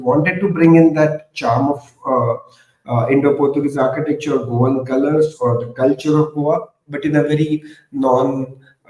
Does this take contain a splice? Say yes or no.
no